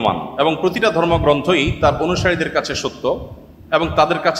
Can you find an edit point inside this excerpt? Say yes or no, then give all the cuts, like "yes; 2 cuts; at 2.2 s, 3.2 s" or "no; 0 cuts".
no; 0 cuts